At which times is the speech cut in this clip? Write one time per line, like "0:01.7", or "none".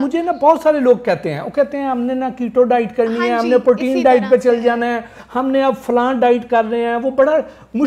none

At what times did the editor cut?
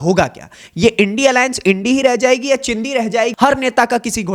0:03.3

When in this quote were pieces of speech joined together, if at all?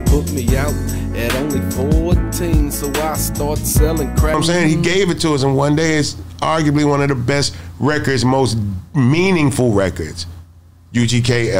0:04.3

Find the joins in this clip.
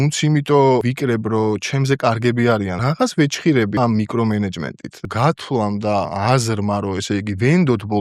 0:00.8
0:02.8
0:03.8
0:05.0
0:06.1

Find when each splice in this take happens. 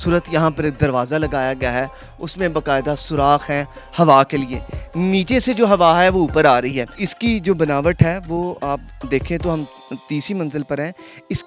0:06.9

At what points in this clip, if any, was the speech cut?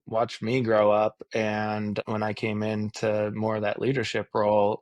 0:02.0

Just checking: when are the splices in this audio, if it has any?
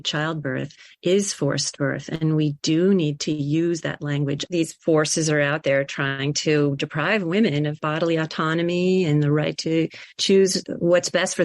0:04.4

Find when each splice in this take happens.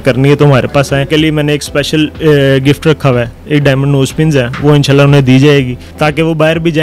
0:01.1
0:03.4
0:05.8

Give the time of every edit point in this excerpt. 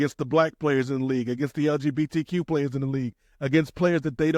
none

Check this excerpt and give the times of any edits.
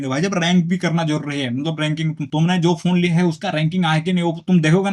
none

